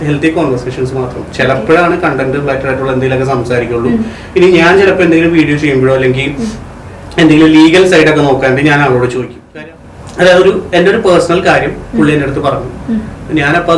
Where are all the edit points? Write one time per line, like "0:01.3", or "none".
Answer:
0:09.5